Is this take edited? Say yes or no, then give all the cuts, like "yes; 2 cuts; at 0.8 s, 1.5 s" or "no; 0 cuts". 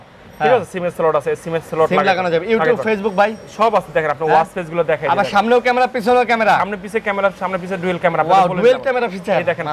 no; 0 cuts